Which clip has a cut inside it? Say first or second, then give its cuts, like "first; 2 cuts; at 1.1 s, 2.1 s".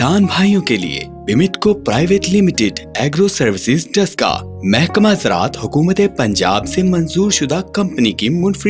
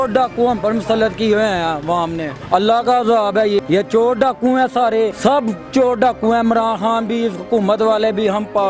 second; 3 cuts; at 2.3 s, 3.6 s, 5.1 s